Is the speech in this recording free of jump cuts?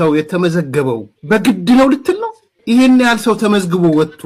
yes; 0 cuts

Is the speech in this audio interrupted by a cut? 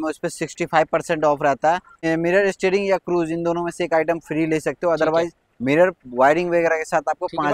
no; 0 cuts

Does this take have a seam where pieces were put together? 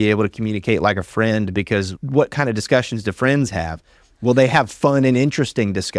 no; 0 cuts

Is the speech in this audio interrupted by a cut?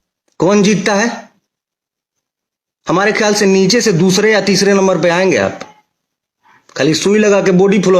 no; 0 cuts

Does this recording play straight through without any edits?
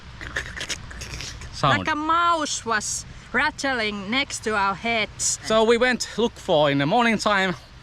no; 1 cut; at 5.3 s

